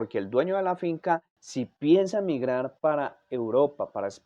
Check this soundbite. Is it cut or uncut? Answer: cut